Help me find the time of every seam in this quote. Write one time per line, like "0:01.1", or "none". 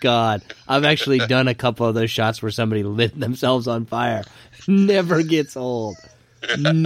none